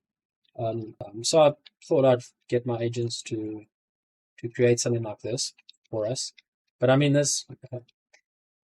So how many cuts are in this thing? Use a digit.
1